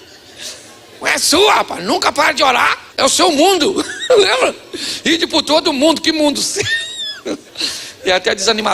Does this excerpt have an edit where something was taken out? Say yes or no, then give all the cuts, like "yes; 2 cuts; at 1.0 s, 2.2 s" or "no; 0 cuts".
yes; 2 cuts; at 2.8 s, 7.5 s